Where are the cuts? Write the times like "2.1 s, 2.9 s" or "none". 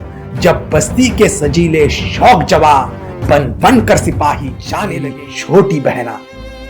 4.9 s